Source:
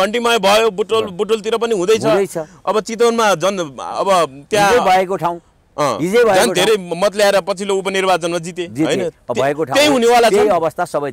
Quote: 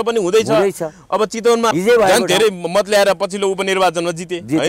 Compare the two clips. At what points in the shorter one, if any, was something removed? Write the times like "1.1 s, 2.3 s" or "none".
1.7 s